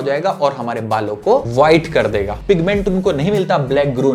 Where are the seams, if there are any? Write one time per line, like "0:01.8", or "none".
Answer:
0:01.5
0:02.3